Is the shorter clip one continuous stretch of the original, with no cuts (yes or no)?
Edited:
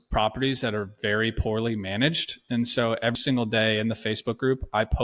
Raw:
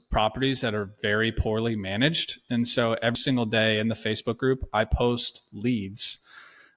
yes